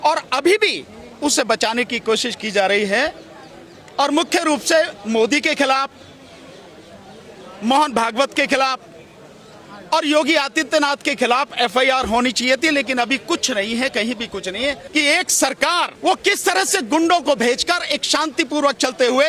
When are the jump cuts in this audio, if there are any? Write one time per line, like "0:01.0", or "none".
0:14.8
0:15.9